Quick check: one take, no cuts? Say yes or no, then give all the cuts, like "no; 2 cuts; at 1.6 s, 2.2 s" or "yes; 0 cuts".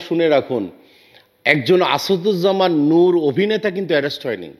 yes; 0 cuts